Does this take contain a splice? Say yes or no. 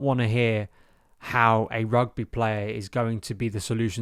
no